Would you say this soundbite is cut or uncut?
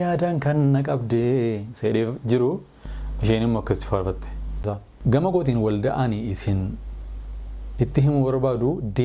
cut